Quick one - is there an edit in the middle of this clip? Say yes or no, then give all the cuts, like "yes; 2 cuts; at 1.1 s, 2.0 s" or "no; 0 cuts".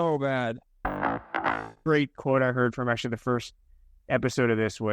yes; 1 cut; at 1.2 s